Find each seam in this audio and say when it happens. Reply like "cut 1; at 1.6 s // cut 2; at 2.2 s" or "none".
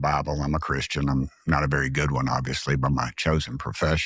none